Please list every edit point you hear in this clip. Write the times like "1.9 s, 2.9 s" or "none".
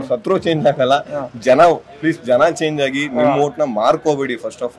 none